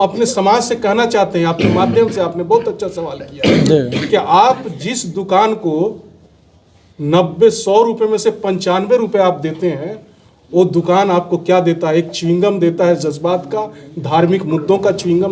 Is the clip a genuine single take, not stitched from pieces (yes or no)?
yes